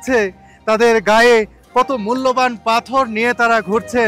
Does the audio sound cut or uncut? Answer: uncut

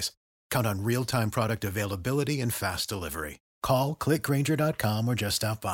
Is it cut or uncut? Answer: uncut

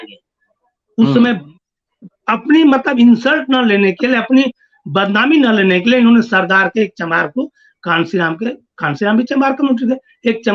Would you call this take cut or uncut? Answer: uncut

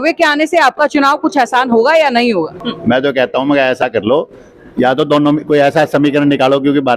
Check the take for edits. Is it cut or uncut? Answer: cut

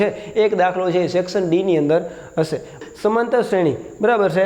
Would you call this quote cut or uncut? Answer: cut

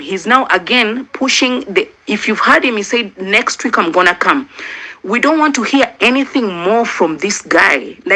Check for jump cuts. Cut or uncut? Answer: uncut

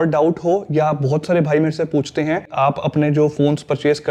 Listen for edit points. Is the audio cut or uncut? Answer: uncut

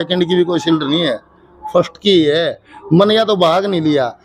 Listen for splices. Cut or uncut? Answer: uncut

